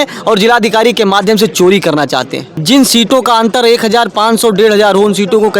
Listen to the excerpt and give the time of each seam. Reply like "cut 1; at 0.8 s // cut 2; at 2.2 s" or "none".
cut 1; at 2.5 s